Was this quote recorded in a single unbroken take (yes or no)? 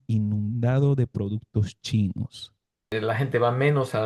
no